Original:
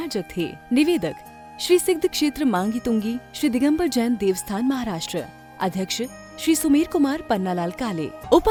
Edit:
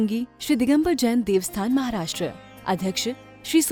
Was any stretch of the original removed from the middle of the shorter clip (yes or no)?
no